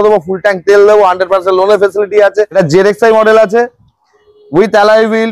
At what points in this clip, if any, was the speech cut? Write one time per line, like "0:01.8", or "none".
0:02.5